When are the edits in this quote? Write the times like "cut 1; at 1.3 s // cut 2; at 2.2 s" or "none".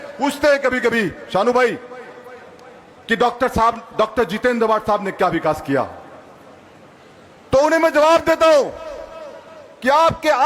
none